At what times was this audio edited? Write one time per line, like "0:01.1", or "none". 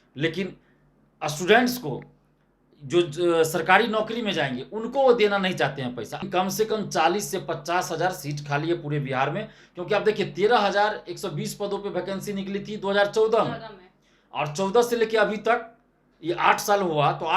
0:06.2